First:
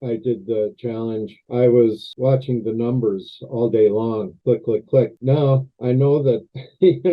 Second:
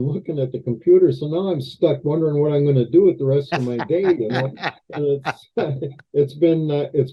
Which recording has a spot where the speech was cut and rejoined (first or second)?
first